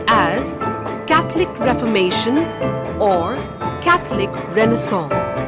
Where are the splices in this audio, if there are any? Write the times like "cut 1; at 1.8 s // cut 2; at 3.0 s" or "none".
none